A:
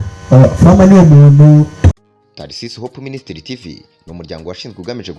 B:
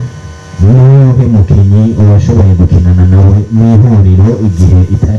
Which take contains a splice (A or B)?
A